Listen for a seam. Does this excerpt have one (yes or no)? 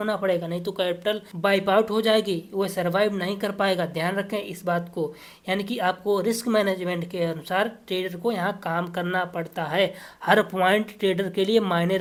no